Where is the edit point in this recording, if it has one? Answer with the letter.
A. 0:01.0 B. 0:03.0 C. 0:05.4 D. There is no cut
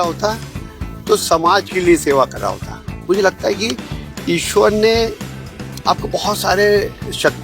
B